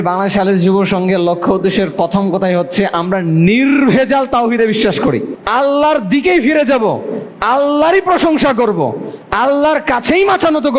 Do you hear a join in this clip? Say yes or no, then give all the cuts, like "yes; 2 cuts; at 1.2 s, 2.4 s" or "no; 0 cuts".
yes; 1 cut; at 5.3 s